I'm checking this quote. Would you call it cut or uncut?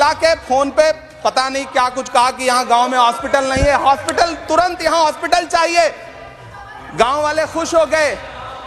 uncut